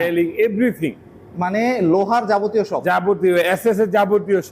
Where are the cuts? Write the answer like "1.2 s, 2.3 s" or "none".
none